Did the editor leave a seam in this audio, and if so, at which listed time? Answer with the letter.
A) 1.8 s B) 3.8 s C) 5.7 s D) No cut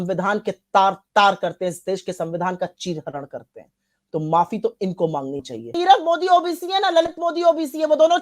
C